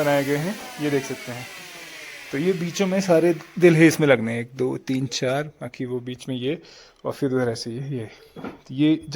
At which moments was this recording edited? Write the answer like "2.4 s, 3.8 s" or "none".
none